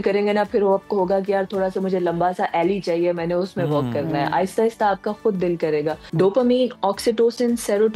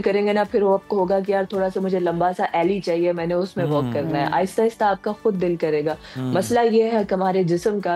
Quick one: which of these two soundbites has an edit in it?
first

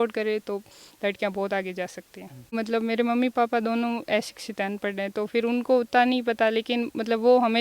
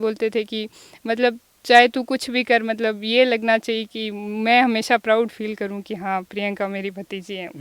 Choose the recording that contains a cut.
first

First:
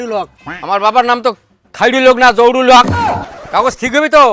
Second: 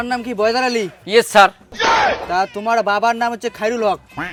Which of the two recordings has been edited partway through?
first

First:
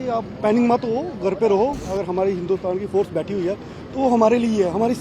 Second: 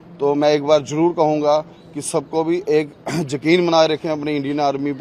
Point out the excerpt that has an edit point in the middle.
first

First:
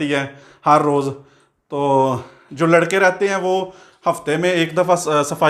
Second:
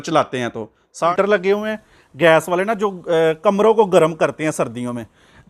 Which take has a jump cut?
second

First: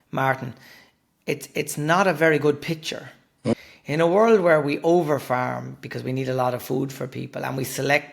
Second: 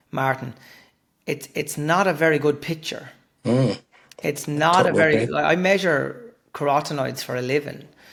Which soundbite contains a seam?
first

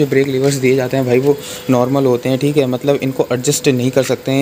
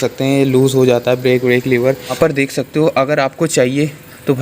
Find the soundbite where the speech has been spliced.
second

